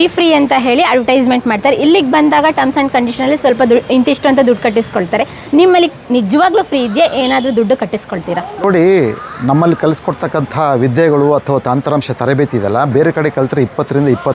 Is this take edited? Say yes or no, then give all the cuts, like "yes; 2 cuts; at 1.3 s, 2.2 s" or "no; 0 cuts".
no; 0 cuts